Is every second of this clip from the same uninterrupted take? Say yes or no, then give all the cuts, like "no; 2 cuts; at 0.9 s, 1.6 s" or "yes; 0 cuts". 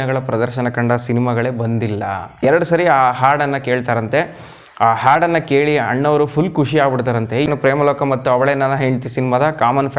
no; 2 cuts; at 2.4 s, 7.5 s